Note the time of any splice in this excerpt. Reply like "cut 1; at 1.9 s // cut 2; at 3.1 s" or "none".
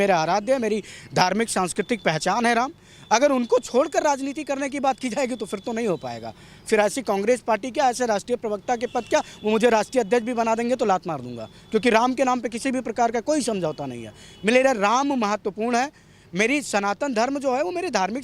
none